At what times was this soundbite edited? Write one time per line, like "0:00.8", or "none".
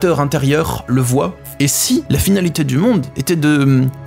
0:01.3